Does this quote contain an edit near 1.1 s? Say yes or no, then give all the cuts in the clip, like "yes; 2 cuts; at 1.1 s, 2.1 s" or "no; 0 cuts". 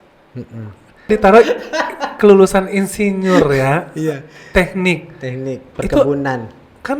yes; 1 cut; at 1.1 s